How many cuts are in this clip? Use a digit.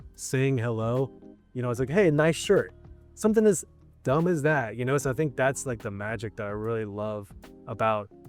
0